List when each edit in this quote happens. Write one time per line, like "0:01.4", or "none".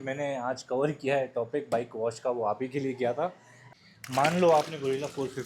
0:03.5